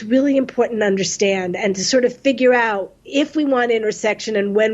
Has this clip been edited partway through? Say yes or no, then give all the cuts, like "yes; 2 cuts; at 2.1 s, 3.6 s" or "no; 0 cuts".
yes; 1 cut; at 2.9 s